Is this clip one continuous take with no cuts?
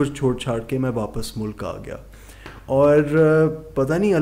yes; 0 cuts

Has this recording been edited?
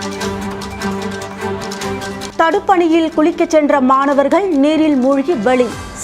yes; 1 cut; at 2.3 s

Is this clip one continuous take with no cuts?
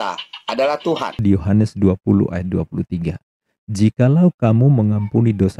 no; 1 cut; at 1.2 s

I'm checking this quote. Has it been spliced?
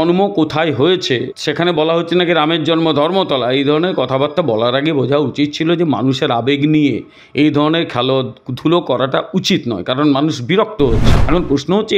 yes; 2 cuts; at 1.4 s, 11.2 s

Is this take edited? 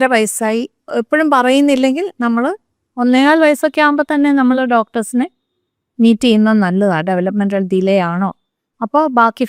no; 0 cuts

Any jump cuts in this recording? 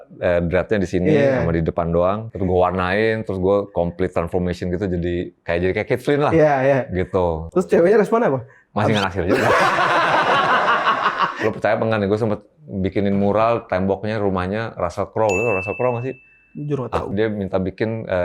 yes; 4 cuts; at 2.3 s, 7.5 s, 11.3 s, 17.1 s

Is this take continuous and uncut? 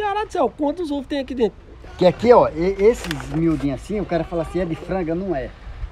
no; 1 cut; at 1.8 s

